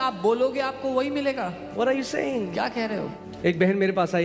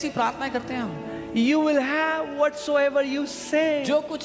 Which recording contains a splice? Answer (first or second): first